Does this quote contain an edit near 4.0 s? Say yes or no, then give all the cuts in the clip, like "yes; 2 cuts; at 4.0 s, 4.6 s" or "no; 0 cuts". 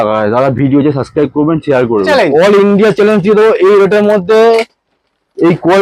no; 1 cut; at 2.1 s